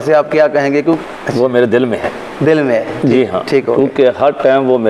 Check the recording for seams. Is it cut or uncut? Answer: cut